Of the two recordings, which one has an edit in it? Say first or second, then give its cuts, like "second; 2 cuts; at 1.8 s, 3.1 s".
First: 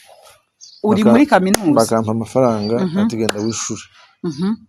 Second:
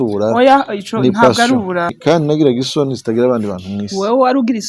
second; 1 cut; at 1.9 s